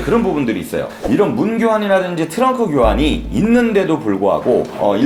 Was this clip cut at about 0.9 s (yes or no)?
no